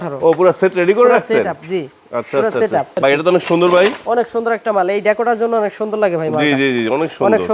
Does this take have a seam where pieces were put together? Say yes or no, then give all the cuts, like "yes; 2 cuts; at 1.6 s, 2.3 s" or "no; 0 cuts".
yes; 1 cut; at 3.0 s